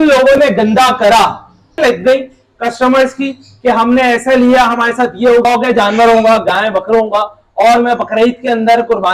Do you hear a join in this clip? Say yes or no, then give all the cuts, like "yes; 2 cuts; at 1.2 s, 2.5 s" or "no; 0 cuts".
yes; 2 cuts; at 1.7 s, 5.4 s